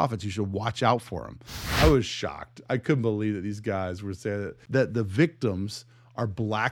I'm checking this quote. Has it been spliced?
yes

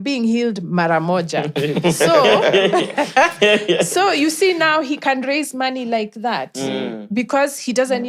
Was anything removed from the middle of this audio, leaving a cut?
no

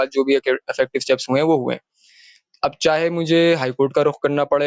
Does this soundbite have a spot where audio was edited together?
no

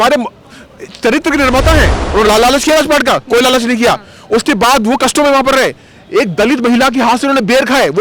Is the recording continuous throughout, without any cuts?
no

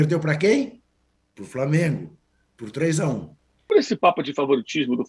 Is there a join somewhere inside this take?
yes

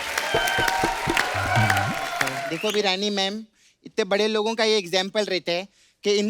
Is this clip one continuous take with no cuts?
no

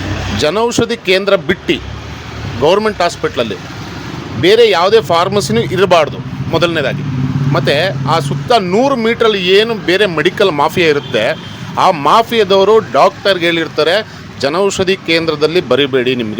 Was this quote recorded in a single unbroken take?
yes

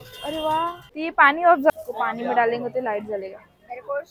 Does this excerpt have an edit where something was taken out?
yes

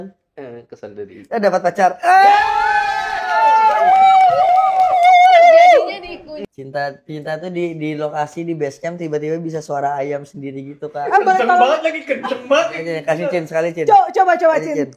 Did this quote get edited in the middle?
yes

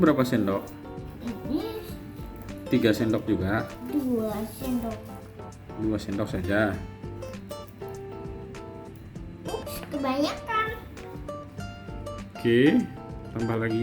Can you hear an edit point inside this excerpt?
yes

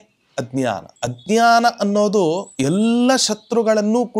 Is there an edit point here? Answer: yes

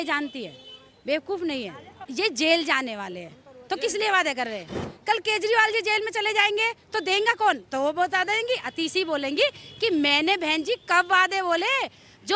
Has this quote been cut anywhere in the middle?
yes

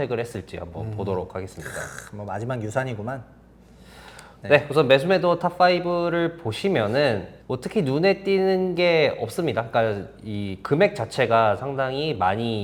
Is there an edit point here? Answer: no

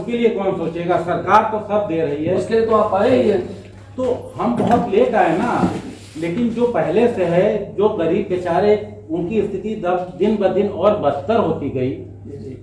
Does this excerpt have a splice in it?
no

